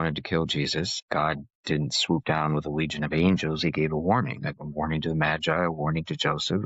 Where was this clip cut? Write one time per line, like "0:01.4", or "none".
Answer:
0:01.0